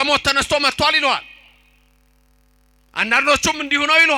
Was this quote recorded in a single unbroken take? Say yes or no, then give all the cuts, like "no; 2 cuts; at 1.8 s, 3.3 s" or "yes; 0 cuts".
yes; 0 cuts